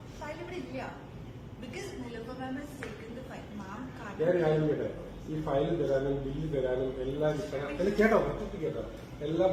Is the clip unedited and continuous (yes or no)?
yes